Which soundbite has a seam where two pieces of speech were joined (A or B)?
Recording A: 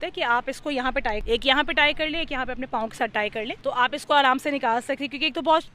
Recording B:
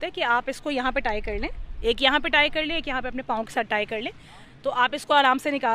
A